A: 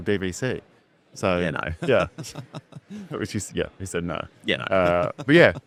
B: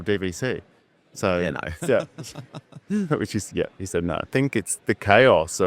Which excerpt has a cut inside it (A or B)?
B